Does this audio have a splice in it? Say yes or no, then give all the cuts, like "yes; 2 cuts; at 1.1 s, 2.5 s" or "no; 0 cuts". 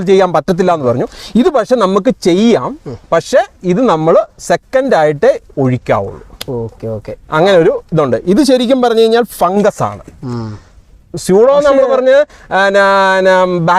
no; 0 cuts